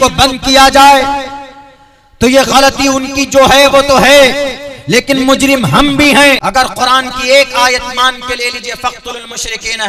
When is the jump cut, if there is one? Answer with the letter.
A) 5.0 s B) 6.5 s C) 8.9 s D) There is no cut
B